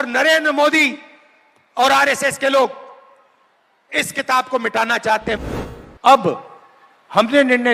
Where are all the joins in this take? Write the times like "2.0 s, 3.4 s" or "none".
5.4 s